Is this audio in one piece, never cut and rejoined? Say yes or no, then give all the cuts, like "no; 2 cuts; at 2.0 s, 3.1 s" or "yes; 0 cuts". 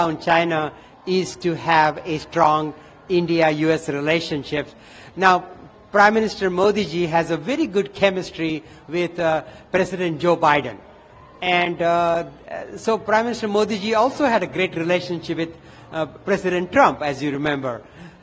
yes; 0 cuts